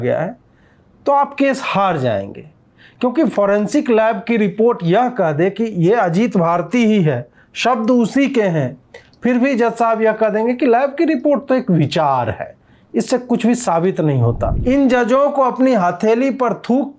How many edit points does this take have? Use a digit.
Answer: 1